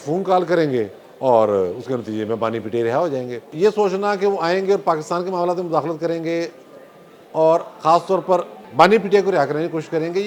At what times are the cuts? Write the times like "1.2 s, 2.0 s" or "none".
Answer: 3.5 s, 8.6 s

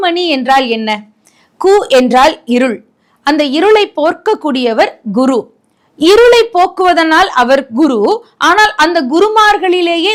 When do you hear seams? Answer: none

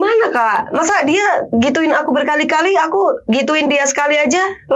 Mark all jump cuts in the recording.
none

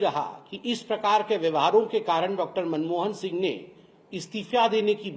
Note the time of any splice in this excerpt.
none

